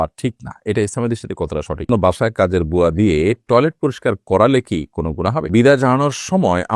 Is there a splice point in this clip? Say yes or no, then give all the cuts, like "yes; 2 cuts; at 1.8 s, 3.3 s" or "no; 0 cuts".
yes; 2 cuts; at 1.9 s, 5.5 s